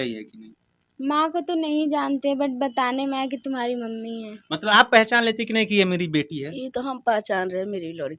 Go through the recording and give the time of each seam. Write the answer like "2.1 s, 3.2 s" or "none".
4.7 s